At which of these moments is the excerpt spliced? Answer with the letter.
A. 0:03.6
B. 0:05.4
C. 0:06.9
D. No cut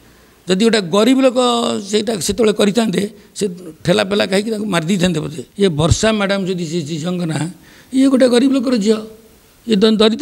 B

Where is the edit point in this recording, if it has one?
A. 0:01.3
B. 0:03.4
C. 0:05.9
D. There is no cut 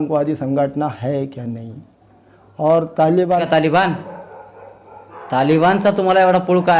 B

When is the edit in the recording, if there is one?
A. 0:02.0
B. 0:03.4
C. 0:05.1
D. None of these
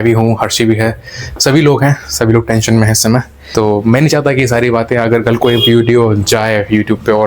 B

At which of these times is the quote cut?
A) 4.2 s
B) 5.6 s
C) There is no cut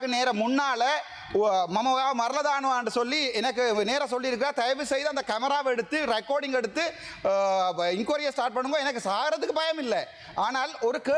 C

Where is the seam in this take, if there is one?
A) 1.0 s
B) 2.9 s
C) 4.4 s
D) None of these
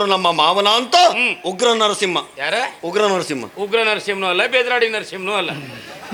D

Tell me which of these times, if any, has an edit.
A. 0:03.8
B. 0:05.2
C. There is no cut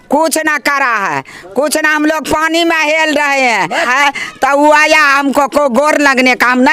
A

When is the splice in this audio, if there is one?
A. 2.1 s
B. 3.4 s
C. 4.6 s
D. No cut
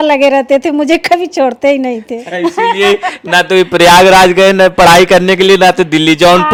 D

